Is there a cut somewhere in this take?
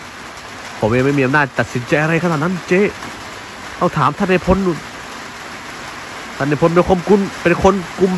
no; 0 cuts

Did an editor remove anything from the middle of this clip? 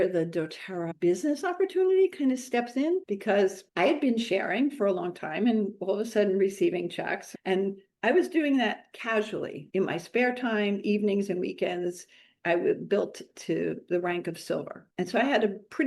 yes; 2 cuts; at 0.9 s, 7.2 s

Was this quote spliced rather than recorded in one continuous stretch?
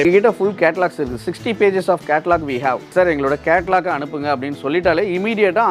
yes; 1 cut; at 2.9 s

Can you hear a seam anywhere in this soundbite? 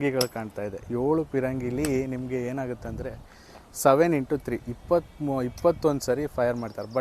no; 0 cuts

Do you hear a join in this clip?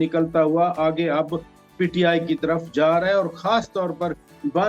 no; 0 cuts

